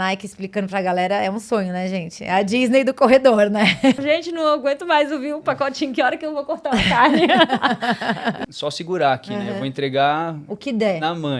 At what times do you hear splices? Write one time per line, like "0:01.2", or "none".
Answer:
0:04.0
0:08.5